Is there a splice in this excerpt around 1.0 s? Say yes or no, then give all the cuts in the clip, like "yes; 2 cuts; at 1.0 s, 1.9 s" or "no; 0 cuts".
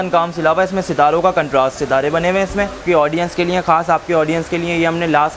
no; 1 cut; at 2.8 s